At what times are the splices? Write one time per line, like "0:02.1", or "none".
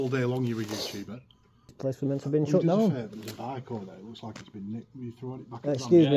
0:01.8